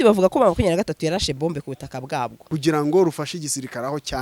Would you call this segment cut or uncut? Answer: cut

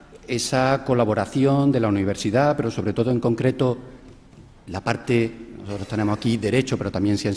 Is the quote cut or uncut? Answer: cut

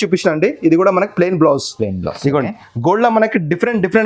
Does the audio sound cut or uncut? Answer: uncut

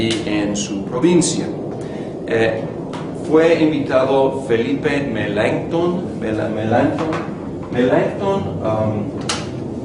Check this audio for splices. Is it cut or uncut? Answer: cut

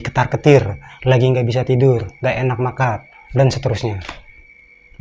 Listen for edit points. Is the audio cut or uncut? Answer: uncut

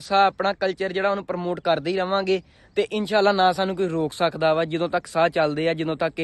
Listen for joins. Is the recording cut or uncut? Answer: uncut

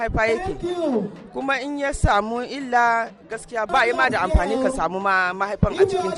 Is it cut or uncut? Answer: cut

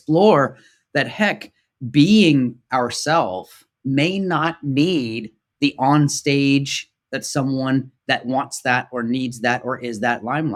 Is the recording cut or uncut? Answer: uncut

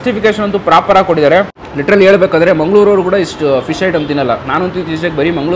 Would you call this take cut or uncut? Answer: cut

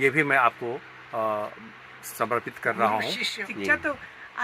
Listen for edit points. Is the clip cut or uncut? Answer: cut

